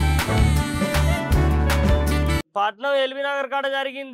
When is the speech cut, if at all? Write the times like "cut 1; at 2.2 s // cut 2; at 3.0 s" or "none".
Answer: cut 1; at 2.4 s